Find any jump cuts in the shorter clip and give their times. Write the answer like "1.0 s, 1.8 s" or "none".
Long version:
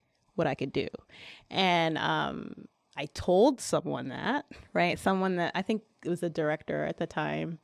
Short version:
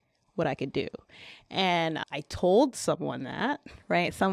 2.0 s